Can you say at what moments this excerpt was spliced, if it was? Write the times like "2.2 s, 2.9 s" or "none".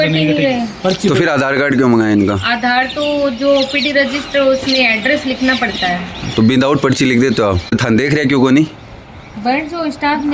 7.8 s